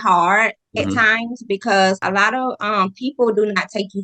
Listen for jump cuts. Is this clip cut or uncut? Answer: cut